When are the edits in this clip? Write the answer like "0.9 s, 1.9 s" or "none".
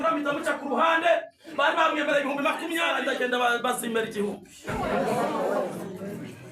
3.2 s